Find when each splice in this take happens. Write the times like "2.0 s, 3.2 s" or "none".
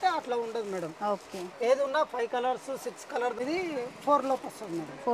3.3 s